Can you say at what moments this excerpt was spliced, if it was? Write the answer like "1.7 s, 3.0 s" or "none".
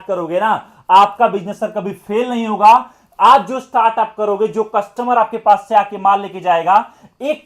none